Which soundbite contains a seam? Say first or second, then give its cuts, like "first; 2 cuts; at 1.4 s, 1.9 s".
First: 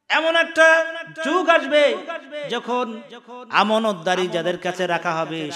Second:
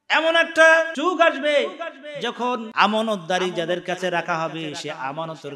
second; 2 cuts; at 0.9 s, 2.7 s